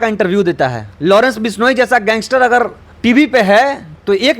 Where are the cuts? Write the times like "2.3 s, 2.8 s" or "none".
0.9 s, 2.8 s